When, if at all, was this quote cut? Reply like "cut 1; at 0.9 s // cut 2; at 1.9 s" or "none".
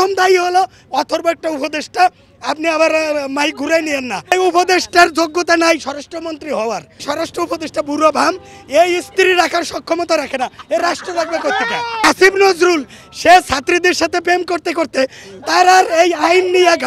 cut 1; at 4.3 s // cut 2; at 7.0 s // cut 3; at 12.0 s